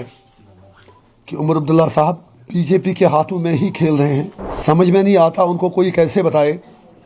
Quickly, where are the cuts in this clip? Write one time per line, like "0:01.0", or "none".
0:02.3
0:04.4